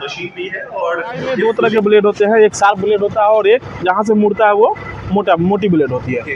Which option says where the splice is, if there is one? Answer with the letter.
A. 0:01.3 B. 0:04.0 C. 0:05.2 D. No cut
A